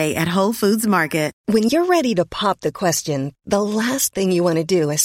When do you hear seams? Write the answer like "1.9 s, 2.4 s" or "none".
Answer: 1.4 s

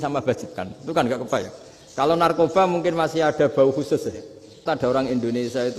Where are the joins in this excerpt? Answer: 4.6 s

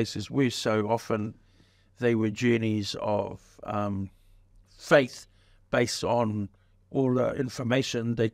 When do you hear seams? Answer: none

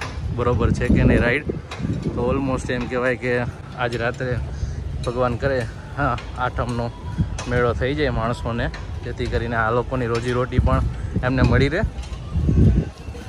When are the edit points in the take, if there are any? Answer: none

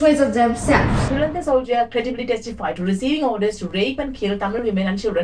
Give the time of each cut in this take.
1.0 s

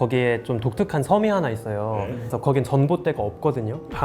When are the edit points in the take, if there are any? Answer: 2.2 s

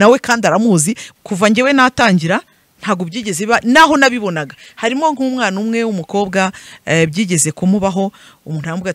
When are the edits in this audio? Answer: 1.0 s

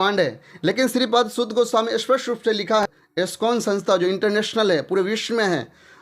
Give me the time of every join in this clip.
2.8 s

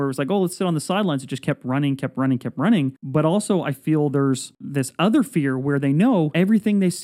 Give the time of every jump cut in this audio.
3.0 s, 4.6 s, 6.3 s

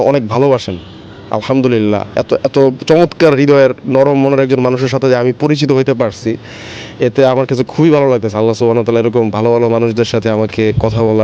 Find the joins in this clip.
none

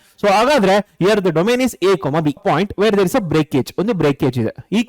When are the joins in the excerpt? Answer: 2.4 s

